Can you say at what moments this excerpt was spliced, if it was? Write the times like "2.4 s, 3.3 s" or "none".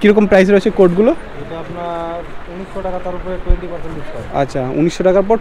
none